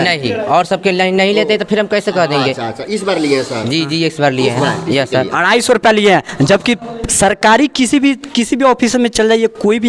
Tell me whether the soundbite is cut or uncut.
uncut